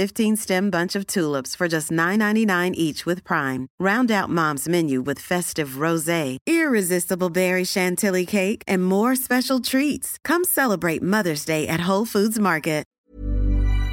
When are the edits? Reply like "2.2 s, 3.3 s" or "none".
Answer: 12.9 s